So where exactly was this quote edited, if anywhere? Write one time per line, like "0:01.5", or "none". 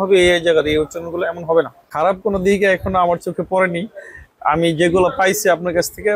0:01.8